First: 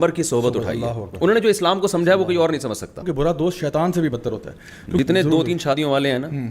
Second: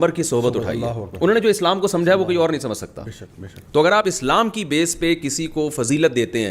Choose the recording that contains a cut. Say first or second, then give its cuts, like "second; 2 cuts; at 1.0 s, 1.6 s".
first; 2 cuts; at 3.1 s, 5.0 s